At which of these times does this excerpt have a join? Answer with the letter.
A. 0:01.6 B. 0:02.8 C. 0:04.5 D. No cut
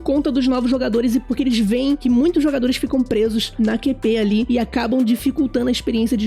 C